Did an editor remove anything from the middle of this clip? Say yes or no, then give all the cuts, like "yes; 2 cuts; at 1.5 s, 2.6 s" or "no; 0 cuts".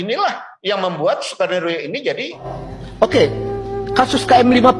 yes; 1 cut; at 2.5 s